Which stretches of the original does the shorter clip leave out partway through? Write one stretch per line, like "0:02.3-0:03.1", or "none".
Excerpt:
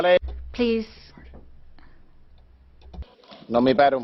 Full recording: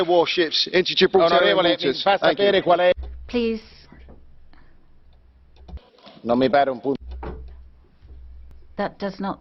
none